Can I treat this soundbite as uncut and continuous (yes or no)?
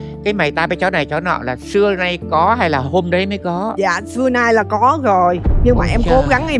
yes